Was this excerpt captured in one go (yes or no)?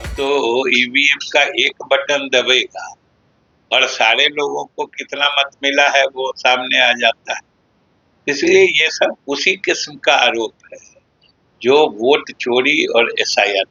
yes